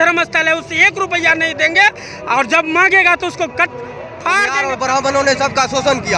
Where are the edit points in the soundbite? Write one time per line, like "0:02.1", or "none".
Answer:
0:04.6